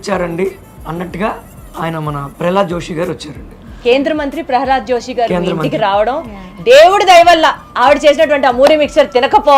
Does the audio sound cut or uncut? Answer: uncut